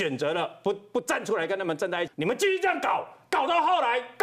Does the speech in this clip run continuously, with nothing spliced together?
no; 1 cut; at 2.1 s

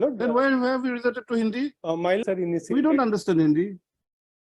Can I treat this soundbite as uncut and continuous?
no; 1 cut; at 2.2 s

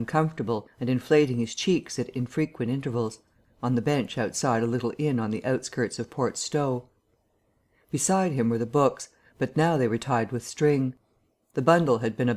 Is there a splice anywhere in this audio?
yes; 1 cut; at 5.8 s

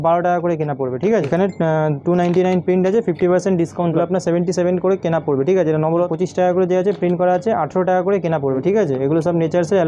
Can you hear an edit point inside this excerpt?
yes; 4 cuts; at 1.3 s, 3.9 s, 6.1 s, 8.6 s

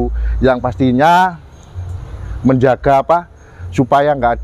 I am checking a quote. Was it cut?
no; 0 cuts

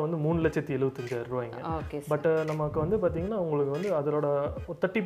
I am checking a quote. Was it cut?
no; 0 cuts

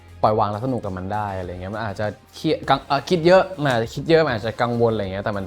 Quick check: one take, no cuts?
yes; 0 cuts

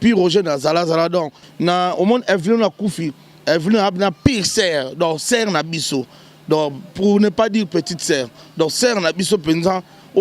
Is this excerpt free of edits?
no; 1 cut; at 1.3 s

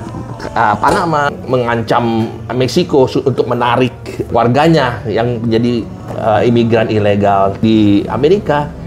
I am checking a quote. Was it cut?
yes; 3 cuts; at 1.3 s, 4.3 s, 7.6 s

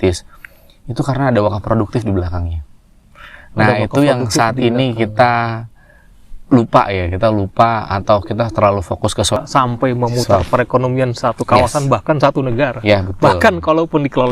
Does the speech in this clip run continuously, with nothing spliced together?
no; 1 cut; at 9.4 s

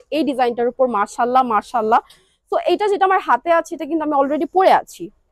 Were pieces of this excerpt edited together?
no; 0 cuts

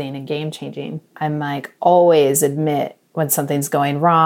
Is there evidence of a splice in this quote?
yes; 1 cut; at 1.0 s

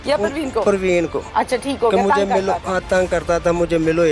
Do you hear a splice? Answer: yes; 1 cut; at 1.2 s

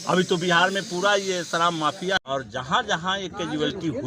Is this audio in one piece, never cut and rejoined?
no; 1 cut; at 2.2 s

